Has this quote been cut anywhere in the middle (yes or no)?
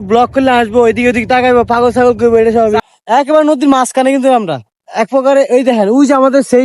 yes